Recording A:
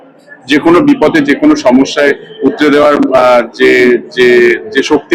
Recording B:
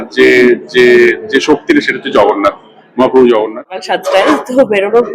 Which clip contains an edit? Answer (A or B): B